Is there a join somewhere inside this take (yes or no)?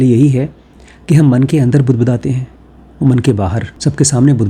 no